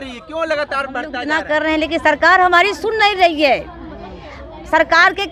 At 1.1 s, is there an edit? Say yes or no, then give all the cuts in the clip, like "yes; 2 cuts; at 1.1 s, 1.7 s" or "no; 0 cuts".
yes; 1 cut; at 1.1 s